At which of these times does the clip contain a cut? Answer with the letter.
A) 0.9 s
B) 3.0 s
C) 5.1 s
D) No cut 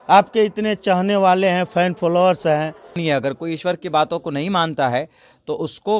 B